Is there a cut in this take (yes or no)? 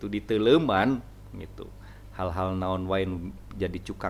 no